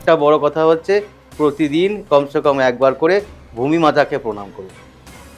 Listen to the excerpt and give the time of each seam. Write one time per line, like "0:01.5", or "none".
none